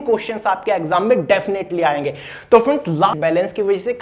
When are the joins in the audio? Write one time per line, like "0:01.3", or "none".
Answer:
0:03.1